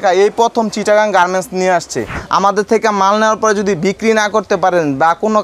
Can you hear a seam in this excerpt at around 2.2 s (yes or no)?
yes